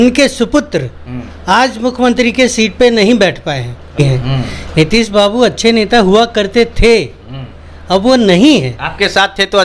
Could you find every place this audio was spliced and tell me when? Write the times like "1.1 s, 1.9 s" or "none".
4.0 s